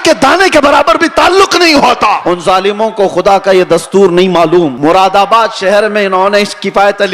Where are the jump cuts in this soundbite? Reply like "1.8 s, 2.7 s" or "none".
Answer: 2.2 s, 4.7 s